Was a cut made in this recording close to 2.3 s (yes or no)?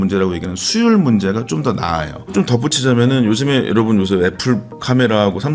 yes